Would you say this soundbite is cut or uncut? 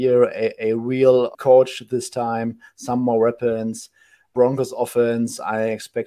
cut